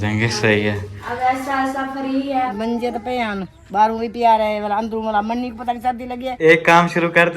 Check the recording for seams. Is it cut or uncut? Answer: cut